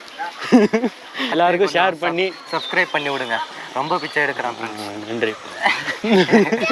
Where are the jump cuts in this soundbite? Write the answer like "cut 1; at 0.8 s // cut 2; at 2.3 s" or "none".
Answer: cut 1; at 1.3 s

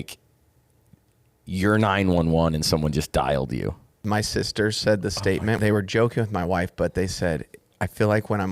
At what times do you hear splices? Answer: cut 1; at 4.0 s // cut 2; at 5.6 s

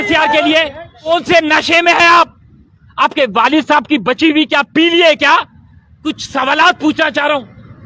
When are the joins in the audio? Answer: cut 1; at 1.1 s // cut 2; at 6.0 s

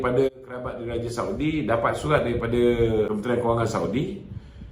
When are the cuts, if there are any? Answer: cut 1; at 3.1 s

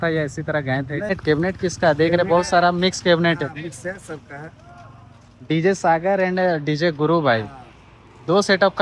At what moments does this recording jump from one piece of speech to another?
cut 1; at 1.1 s

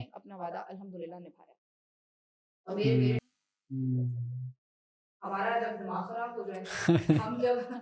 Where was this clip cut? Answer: cut 1; at 3.3 s

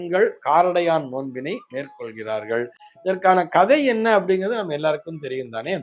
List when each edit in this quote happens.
none

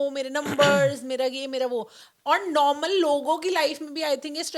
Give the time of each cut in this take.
none

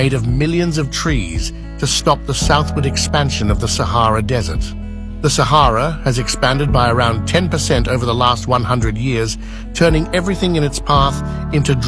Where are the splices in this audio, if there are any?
none

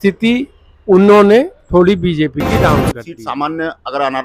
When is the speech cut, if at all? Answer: cut 1; at 2.9 s

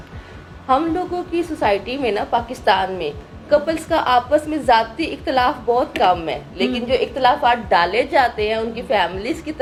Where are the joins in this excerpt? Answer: none

